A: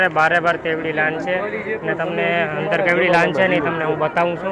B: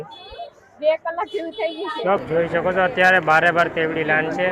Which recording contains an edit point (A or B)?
B